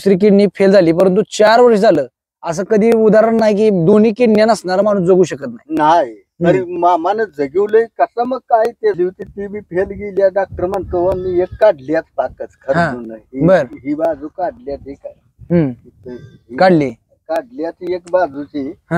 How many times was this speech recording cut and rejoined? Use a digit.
1